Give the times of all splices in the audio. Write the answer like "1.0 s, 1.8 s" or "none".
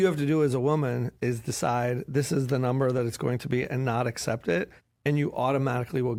none